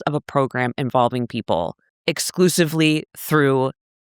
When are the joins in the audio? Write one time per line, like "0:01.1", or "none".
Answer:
0:01.9

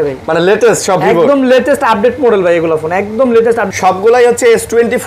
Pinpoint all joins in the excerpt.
0:03.7

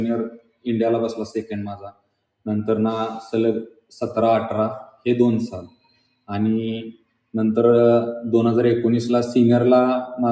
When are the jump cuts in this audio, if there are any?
none

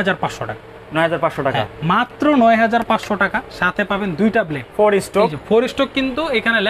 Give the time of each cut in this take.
0:04.6

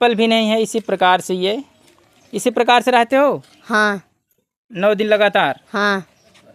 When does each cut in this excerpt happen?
none

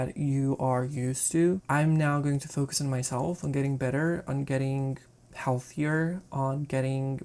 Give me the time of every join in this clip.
0:01.6

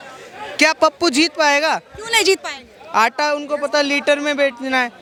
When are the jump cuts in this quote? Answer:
none

